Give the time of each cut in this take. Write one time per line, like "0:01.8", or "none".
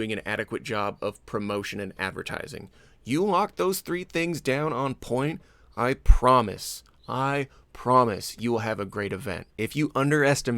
0:09.5